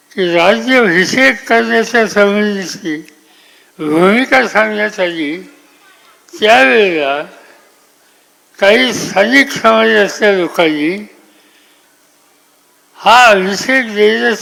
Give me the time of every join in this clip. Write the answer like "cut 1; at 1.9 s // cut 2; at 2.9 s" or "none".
none

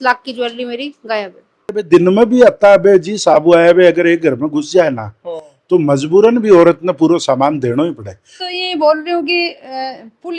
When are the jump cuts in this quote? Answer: cut 1; at 1.8 s // cut 2; at 8.5 s

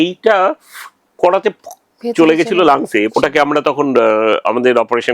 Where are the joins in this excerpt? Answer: cut 1; at 3.1 s

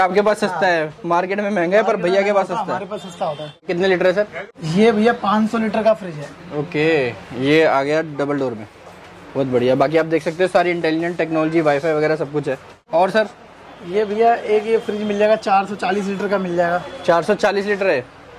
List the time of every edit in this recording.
none

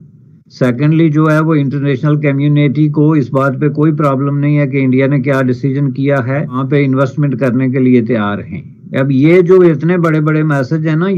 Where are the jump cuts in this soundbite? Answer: none

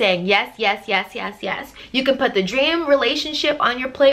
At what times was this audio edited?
cut 1; at 1.8 s

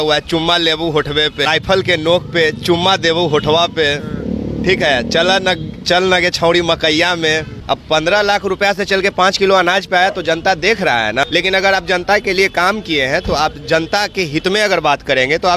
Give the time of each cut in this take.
cut 1; at 1.5 s // cut 2; at 7.5 s // cut 3; at 11.3 s

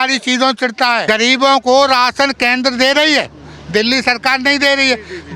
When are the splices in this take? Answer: cut 1; at 1.0 s

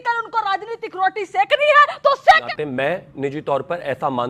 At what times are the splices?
cut 1; at 2.5 s

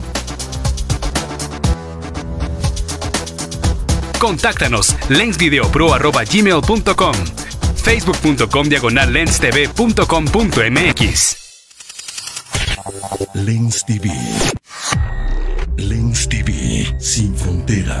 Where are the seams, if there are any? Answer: cut 1; at 11.6 s

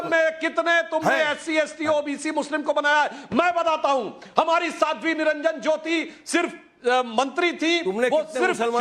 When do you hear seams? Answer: cut 1; at 3.2 s

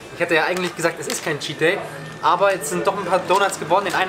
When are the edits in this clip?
none

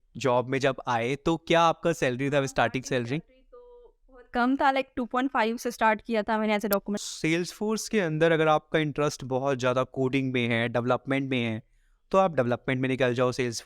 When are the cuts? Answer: cut 1; at 7.0 s

